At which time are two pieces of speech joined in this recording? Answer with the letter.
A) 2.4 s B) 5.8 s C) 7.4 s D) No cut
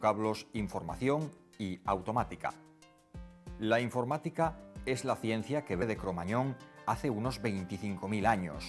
D